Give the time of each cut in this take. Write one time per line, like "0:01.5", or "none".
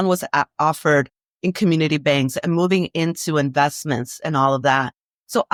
none